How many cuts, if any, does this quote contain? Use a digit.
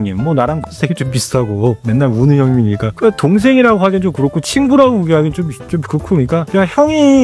3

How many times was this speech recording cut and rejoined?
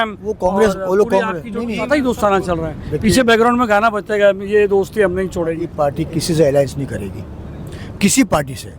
2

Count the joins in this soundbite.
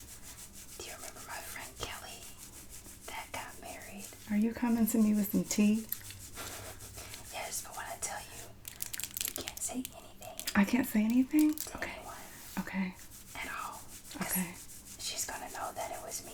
0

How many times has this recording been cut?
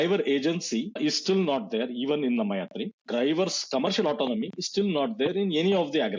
2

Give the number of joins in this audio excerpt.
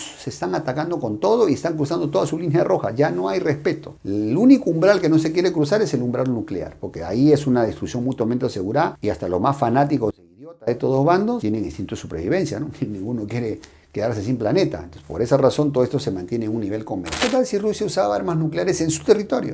1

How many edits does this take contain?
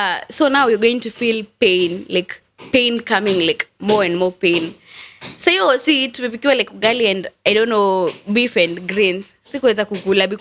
0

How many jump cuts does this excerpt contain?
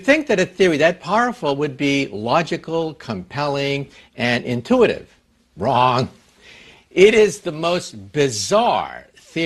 0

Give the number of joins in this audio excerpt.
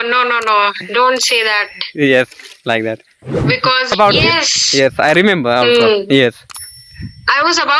1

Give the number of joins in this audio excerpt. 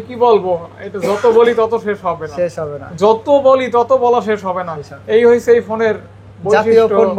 0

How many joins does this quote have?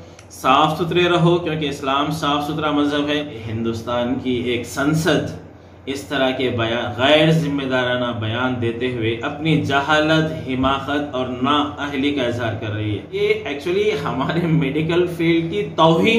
2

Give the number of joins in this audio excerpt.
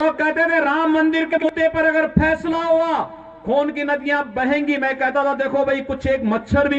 1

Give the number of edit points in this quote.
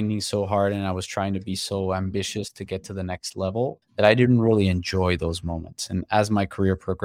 1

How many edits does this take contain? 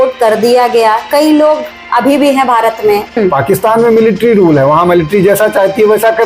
1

